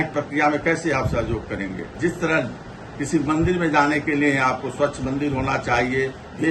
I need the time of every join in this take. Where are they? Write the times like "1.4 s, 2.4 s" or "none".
1.9 s